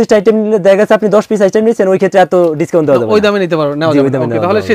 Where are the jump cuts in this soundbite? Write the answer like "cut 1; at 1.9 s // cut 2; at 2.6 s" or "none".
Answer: none

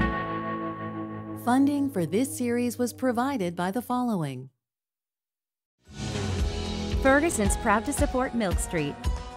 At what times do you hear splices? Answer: cut 1; at 1.3 s

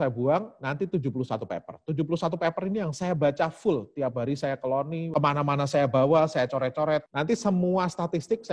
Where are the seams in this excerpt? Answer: cut 1; at 5.1 s

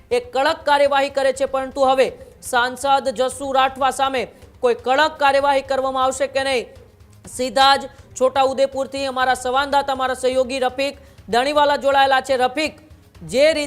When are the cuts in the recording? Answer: none

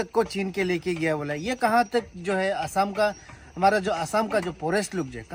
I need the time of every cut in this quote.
none

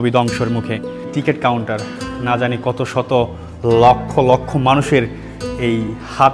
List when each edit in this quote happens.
cut 1; at 1.1 s

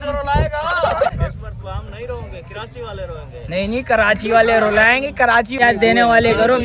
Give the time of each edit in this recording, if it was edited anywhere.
cut 1; at 1.1 s // cut 2; at 5.5 s

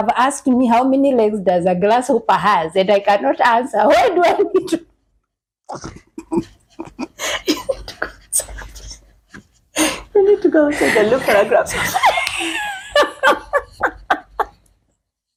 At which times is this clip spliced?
none

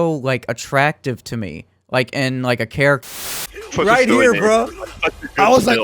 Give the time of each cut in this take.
cut 1; at 3.1 s

